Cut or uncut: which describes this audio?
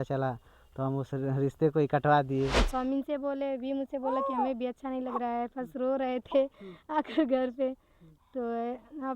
cut